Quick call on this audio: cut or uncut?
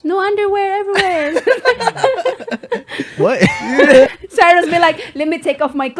cut